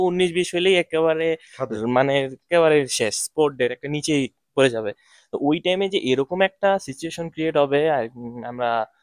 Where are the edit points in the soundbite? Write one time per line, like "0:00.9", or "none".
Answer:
none